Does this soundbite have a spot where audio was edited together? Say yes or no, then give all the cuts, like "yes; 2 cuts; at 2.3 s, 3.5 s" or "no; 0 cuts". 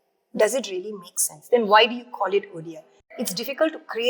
yes; 1 cut; at 3.0 s